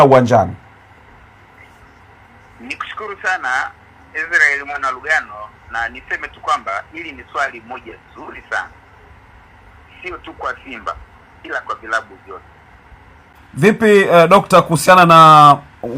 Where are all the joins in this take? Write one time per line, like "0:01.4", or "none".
0:13.3